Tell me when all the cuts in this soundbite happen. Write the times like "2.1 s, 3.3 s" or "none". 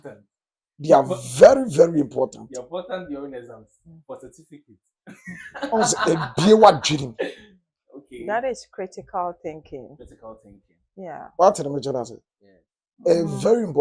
none